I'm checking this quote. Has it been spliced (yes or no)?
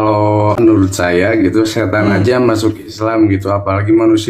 no